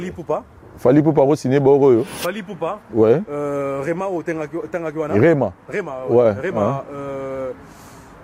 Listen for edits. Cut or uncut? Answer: uncut